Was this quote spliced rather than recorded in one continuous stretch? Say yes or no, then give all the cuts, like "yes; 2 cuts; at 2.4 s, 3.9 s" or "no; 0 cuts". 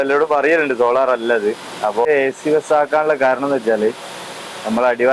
yes; 1 cut; at 2.1 s